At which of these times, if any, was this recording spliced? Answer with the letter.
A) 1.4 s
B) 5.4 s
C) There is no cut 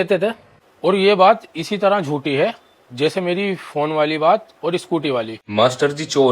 B